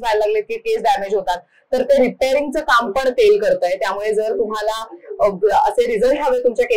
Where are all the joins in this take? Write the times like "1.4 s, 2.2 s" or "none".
none